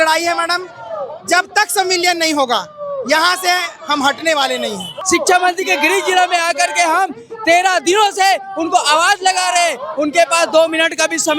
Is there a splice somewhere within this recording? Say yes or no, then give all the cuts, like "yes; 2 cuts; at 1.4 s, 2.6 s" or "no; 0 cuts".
yes; 1 cut; at 4.9 s